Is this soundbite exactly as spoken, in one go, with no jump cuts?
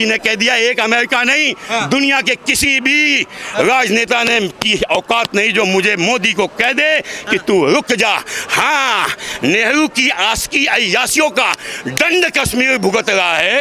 yes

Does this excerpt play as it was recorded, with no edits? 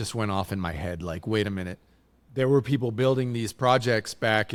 yes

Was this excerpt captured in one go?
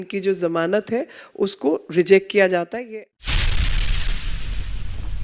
no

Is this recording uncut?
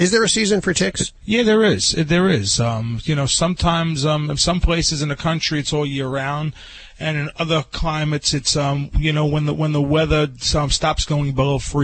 no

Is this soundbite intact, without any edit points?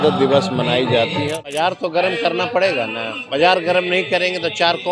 no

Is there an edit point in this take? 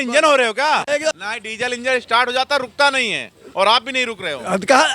yes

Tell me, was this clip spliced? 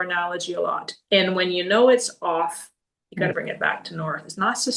yes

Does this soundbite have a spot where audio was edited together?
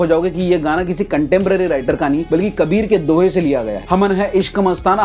no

